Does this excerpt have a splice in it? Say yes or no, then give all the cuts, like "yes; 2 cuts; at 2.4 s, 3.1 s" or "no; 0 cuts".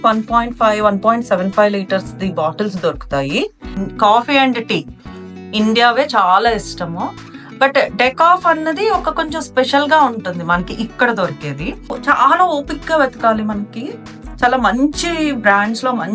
yes; 2 cuts; at 3.8 s, 12.0 s